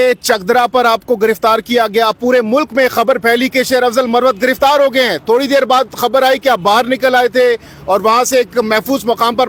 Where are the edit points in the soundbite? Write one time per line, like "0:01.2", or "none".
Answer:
none